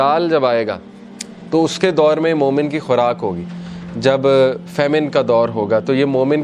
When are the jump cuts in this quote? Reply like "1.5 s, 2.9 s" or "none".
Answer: none